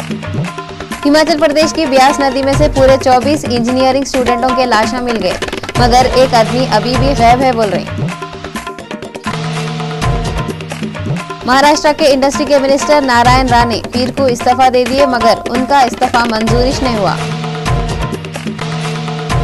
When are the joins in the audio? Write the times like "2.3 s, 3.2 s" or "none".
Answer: none